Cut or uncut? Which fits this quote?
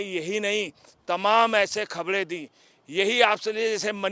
uncut